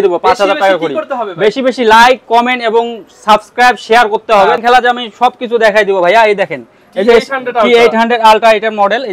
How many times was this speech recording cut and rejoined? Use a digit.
1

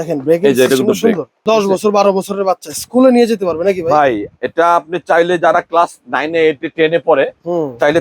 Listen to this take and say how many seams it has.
1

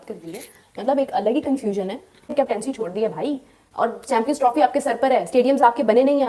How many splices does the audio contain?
1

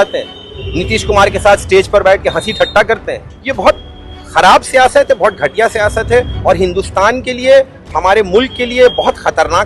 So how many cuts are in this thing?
1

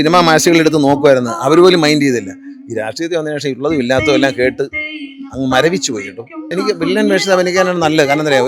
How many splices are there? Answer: 1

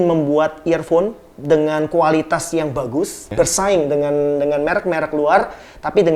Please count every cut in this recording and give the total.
1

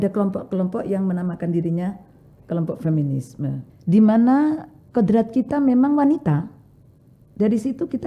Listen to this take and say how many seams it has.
1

